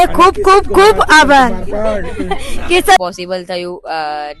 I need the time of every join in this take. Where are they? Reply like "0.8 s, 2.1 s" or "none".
3.0 s